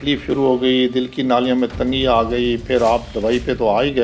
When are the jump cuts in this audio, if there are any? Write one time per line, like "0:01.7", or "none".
none